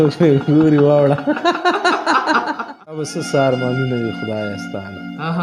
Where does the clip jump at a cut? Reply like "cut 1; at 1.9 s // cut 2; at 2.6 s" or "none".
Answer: cut 1; at 3.2 s